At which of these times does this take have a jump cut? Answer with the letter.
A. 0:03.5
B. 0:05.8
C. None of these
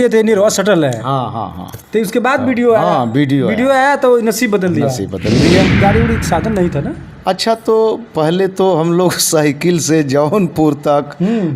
B